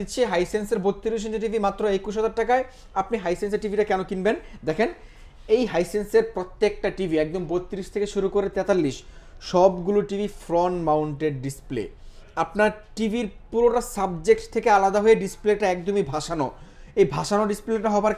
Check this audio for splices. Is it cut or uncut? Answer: uncut